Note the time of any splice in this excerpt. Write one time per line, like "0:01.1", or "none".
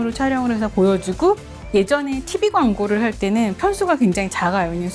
0:01.5